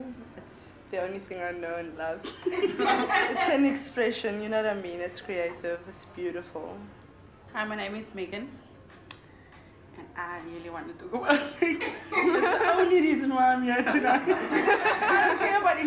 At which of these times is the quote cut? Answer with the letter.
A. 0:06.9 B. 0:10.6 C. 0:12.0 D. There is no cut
A